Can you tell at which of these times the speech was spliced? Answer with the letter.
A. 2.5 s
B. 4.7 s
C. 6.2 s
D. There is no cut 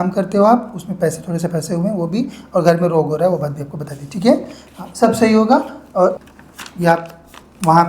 C